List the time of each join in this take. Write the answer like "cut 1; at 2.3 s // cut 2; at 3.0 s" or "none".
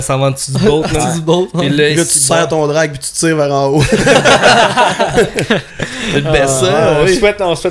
none